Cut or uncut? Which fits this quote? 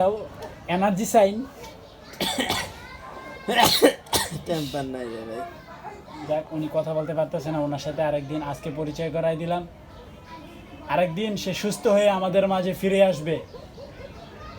uncut